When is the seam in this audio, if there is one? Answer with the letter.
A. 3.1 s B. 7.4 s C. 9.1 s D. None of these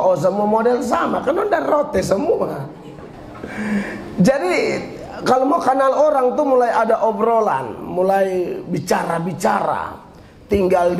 A